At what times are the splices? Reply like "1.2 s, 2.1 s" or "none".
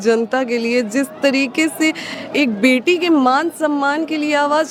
none